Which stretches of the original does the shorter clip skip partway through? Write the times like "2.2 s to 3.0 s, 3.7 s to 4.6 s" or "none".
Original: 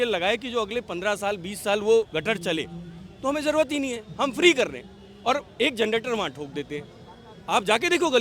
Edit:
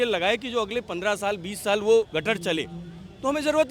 none